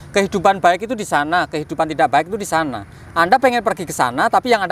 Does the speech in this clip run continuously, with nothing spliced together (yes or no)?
yes